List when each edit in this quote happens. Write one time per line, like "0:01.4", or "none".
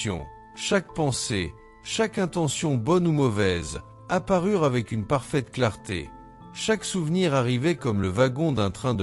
none